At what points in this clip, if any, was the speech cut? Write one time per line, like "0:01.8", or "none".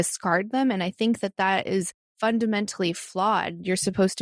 0:02.0